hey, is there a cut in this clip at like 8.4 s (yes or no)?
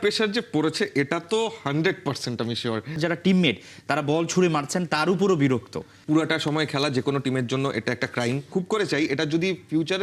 yes